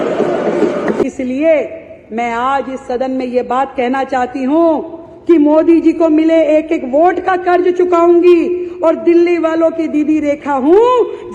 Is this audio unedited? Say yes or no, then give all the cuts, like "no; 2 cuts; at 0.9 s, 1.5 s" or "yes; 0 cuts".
no; 1 cut; at 1.1 s